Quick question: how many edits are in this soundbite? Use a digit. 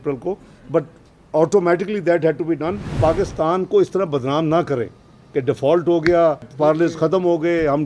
2